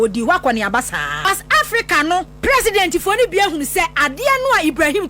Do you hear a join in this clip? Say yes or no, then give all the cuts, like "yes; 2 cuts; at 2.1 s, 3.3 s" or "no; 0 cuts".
yes; 2 cuts; at 1.2 s, 2.3 s